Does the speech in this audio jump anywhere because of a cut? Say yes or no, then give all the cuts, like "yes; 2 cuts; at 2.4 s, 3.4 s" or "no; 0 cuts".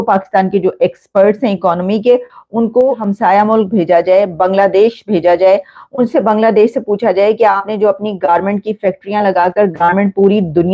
yes; 1 cut; at 3.0 s